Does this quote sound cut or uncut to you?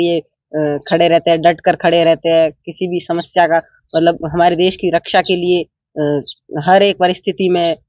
uncut